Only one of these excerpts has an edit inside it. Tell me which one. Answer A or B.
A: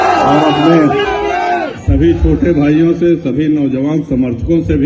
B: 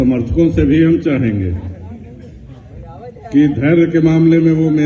A